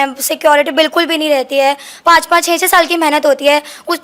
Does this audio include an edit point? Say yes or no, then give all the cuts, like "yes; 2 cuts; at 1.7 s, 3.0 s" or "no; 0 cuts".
yes; 1 cut; at 1.9 s